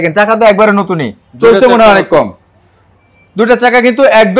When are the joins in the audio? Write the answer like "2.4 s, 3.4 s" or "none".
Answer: none

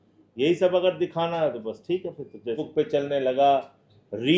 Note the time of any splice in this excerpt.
2.6 s

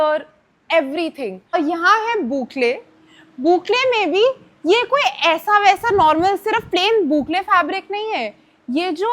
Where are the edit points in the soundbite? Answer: 1.4 s

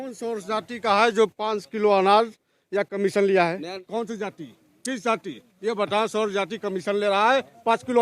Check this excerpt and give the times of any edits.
3.7 s

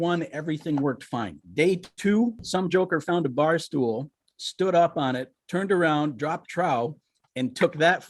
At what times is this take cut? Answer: 1.4 s, 2.4 s, 5.3 s

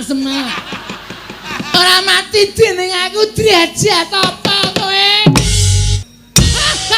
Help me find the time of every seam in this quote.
1.5 s, 5.9 s

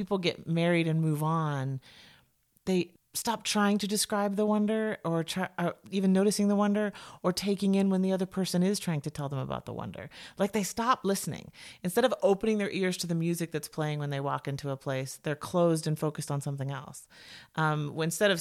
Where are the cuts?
2.9 s

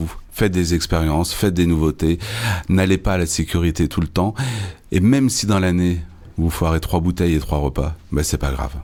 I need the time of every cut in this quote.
none

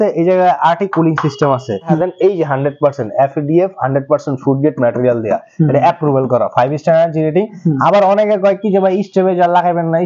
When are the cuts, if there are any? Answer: 2.0 s

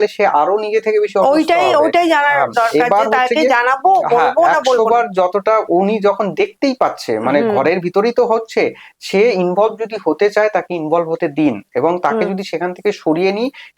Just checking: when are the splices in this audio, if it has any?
none

